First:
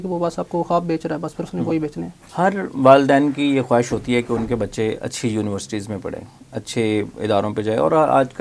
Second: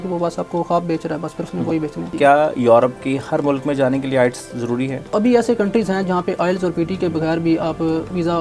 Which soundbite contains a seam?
second; 2 cuts; at 2.1 s, 5.0 s

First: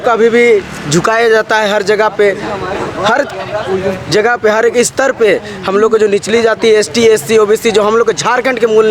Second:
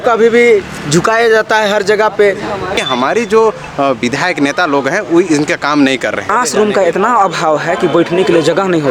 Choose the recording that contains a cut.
second; 2 cuts; at 2.8 s, 6.3 s

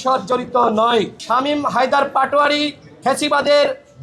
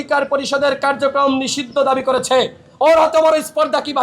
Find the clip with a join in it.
first; 1 cut; at 1.2 s

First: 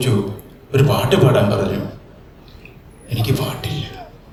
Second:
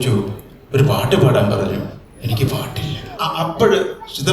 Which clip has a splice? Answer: second; 2 cuts; at 2.1 s, 3.2 s

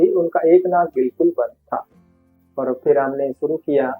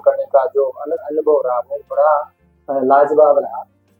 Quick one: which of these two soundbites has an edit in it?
first; 1 cut; at 2.4 s

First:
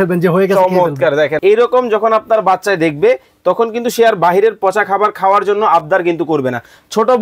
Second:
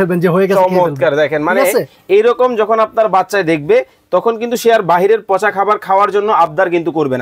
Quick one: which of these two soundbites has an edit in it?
first; 1 cut; at 1.3 s

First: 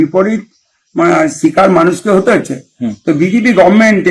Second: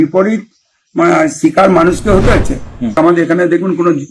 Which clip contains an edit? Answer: second; 1 cut; at 3.0 s

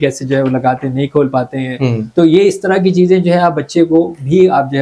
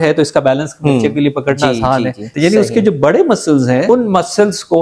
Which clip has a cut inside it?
second; 2 cuts; at 2.3 s, 3.9 s

